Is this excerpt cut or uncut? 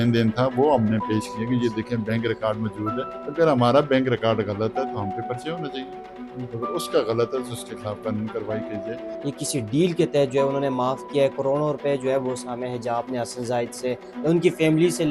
cut